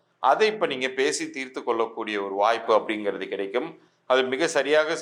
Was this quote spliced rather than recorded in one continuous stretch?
no; 0 cuts

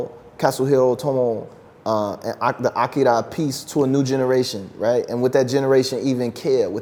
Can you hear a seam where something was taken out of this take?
no; 0 cuts

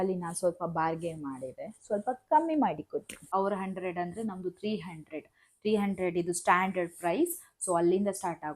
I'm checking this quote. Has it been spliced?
yes; 1 cut; at 3.2 s

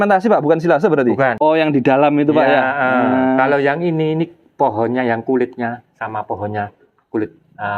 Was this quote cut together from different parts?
yes; 1 cut; at 1.4 s

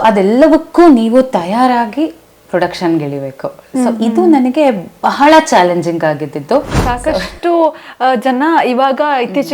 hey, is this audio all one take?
no; 1 cut; at 6.8 s

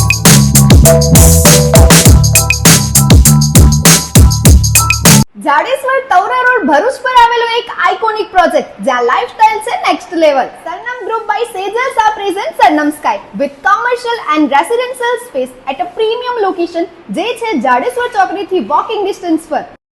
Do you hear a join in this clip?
yes; 1 cut; at 5.3 s

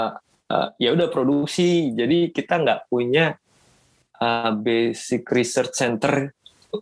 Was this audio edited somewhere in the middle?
no; 0 cuts

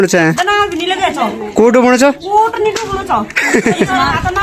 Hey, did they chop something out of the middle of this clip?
no; 0 cuts

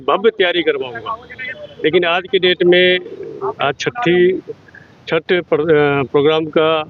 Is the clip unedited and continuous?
yes; 0 cuts

